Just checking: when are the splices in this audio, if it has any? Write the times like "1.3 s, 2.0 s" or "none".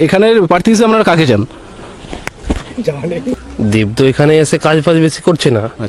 3.4 s

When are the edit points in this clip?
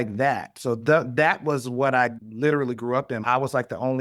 2.2 s, 3.2 s

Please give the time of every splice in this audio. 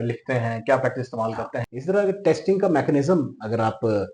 1.5 s

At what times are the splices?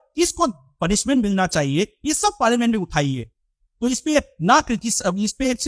none

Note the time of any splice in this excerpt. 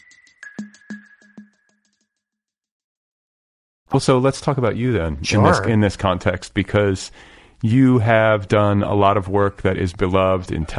none

